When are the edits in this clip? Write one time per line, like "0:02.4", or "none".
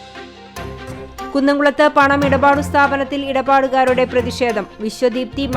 0:01.3